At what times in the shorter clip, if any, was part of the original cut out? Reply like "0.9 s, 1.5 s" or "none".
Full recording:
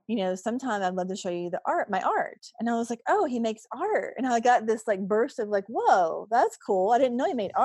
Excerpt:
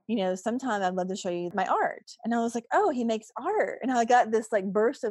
1.5 s